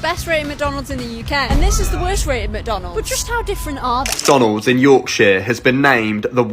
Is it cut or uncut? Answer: cut